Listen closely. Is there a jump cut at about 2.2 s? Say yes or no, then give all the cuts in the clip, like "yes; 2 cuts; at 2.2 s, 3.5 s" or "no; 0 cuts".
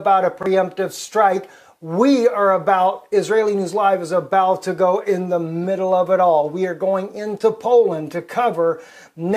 yes; 1 cut; at 2.2 s